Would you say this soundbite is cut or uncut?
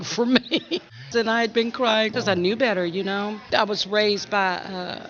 cut